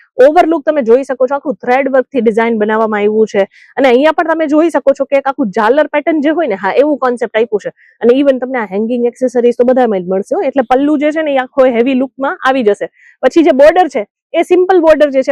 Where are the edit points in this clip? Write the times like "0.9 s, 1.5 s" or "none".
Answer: none